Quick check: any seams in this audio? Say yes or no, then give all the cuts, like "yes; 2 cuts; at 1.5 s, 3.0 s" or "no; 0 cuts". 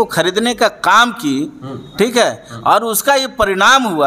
no; 0 cuts